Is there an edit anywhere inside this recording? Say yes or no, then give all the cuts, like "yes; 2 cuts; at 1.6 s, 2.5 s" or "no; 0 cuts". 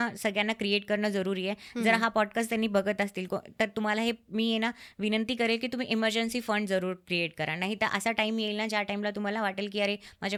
no; 0 cuts